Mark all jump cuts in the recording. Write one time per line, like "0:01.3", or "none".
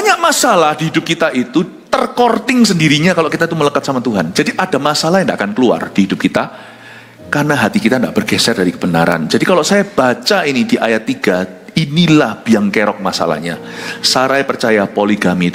none